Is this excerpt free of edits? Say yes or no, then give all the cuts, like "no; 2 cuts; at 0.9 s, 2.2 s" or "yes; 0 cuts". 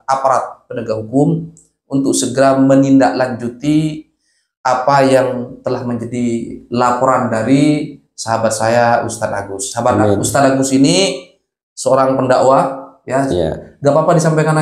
yes; 0 cuts